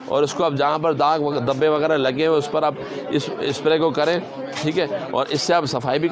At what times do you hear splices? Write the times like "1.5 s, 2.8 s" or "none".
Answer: none